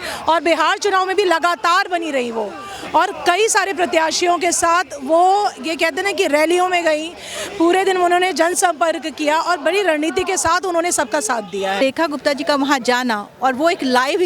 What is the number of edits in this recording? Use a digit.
1